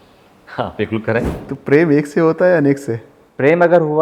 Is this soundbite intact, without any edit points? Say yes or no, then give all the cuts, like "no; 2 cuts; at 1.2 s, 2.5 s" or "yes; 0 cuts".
no; 1 cut; at 1.4 s